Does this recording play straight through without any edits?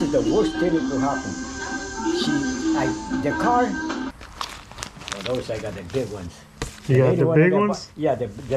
no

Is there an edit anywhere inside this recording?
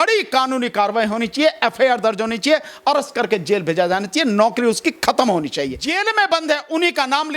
yes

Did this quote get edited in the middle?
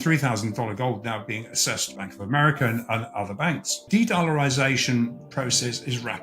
yes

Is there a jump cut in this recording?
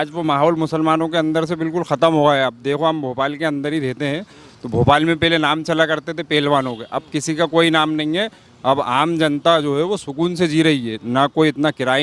no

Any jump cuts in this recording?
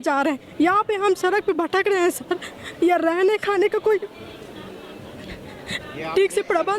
no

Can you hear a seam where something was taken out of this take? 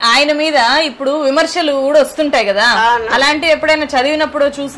no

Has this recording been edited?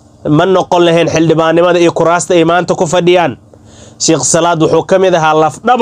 no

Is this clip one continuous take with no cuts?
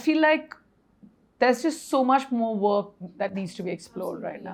yes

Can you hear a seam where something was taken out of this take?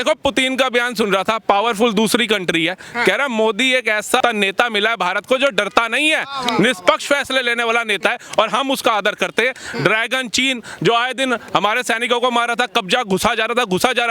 yes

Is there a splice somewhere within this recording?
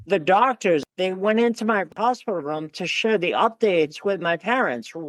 yes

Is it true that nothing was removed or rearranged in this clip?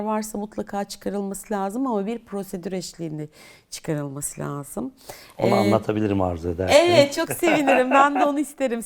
yes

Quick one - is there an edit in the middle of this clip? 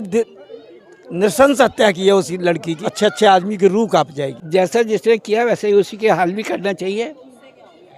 yes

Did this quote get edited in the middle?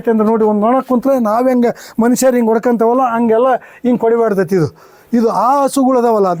no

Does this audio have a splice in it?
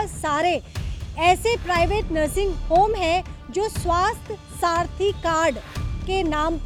no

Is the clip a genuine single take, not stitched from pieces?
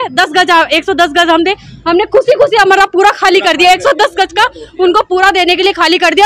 yes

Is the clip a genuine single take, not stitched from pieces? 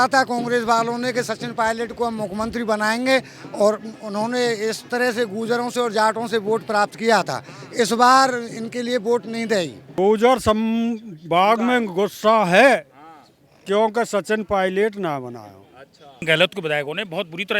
no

